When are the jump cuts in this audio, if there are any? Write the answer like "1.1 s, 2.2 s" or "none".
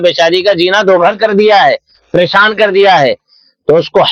none